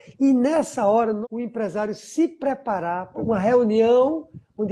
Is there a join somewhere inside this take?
yes; 2 cuts; at 1.2 s, 3.2 s

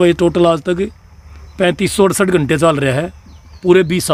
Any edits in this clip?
no; 0 cuts

